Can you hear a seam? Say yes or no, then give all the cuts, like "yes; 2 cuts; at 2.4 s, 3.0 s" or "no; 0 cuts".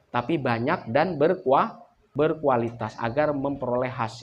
yes; 1 cut; at 2.1 s